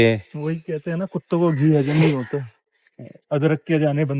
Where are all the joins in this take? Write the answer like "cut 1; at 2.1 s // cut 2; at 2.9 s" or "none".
none